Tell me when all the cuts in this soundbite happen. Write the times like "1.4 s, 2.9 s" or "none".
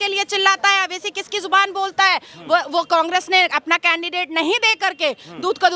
none